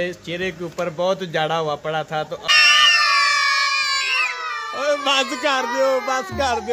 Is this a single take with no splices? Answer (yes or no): no